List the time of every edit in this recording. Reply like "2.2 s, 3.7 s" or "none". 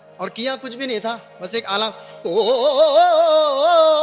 none